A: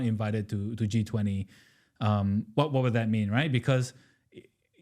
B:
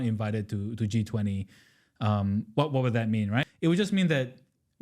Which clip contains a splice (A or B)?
B